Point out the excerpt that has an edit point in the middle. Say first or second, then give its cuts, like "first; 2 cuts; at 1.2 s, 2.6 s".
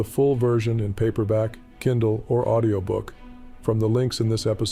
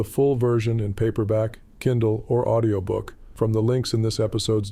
second; 1 cut; at 3.2 s